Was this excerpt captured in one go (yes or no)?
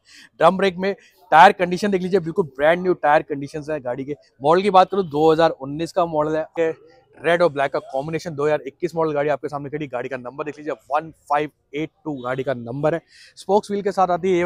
no